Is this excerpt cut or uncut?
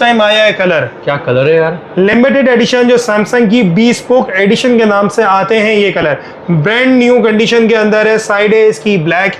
uncut